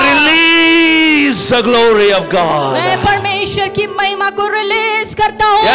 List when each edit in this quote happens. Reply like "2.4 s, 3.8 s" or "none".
none